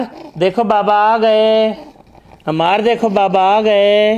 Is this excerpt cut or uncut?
uncut